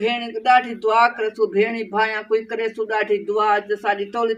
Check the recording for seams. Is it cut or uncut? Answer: uncut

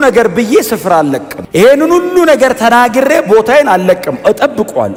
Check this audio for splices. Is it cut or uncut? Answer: uncut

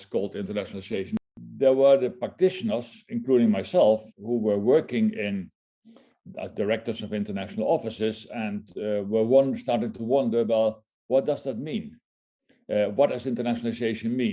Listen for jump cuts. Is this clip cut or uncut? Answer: cut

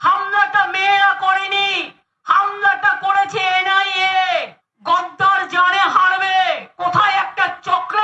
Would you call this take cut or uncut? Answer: uncut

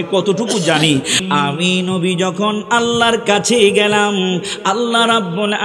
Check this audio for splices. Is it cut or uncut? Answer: cut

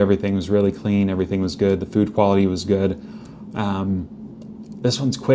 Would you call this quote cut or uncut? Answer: uncut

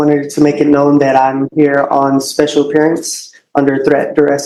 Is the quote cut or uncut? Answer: uncut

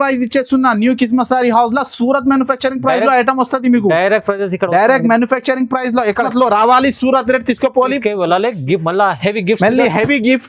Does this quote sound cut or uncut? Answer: uncut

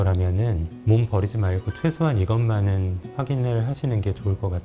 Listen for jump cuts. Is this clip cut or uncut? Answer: uncut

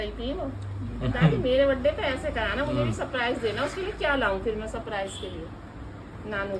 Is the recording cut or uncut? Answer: uncut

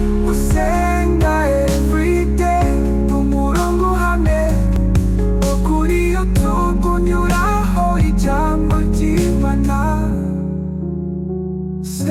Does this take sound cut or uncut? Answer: uncut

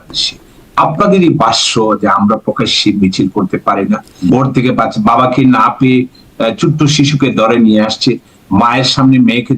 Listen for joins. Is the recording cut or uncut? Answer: cut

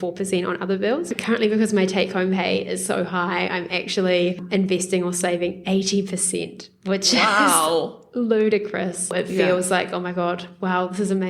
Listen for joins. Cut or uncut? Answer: cut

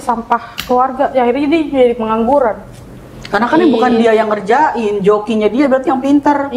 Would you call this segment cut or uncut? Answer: uncut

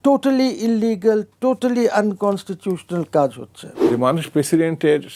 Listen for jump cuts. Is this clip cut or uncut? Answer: cut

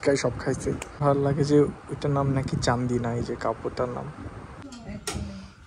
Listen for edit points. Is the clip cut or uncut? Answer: cut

